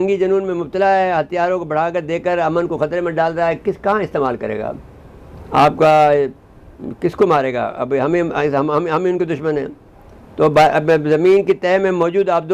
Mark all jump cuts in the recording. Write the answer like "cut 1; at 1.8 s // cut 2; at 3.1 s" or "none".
none